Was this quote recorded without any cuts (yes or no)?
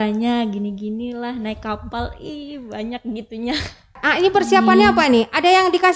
no